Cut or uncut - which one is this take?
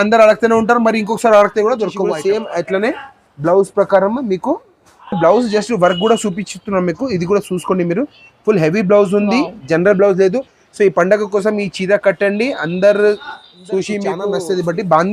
cut